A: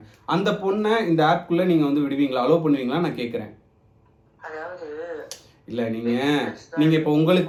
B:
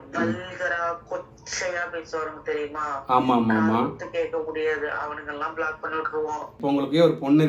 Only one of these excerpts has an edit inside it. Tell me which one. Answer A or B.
B